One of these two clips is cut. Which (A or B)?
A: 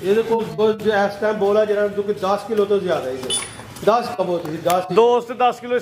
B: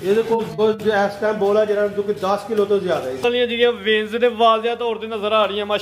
B